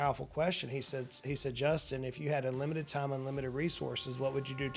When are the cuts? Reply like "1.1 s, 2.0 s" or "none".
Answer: none